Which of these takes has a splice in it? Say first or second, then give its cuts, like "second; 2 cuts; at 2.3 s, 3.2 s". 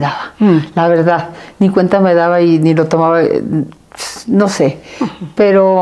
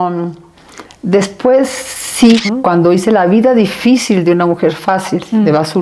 second; 1 cut; at 2.4 s